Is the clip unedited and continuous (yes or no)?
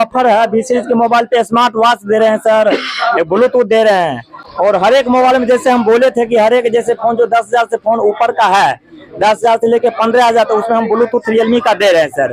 yes